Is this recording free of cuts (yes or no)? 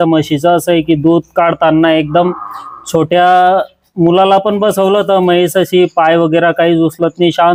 yes